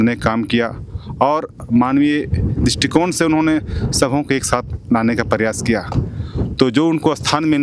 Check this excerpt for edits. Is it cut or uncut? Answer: uncut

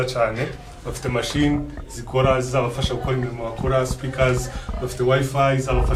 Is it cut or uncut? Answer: uncut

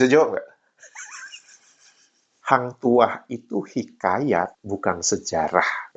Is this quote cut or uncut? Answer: cut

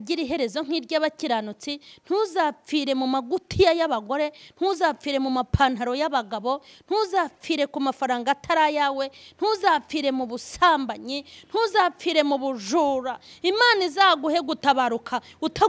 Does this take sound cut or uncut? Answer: uncut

